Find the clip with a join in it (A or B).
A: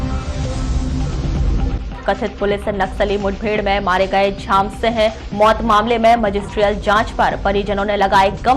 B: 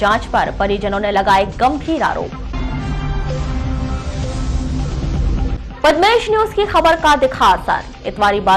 A